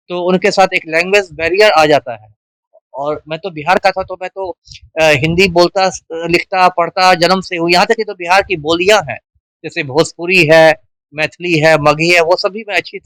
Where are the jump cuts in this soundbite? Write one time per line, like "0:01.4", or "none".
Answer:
none